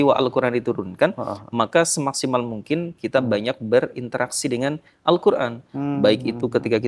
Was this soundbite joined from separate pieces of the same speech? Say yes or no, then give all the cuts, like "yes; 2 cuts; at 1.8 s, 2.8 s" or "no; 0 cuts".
no; 0 cuts